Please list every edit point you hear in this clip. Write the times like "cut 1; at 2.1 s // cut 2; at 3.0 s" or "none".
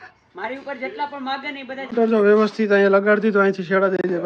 cut 1; at 1.8 s